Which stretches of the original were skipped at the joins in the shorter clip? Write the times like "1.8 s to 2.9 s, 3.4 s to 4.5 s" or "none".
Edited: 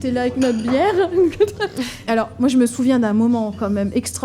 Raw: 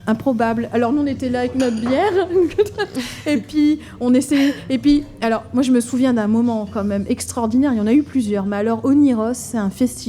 3.1 s to 5.1 s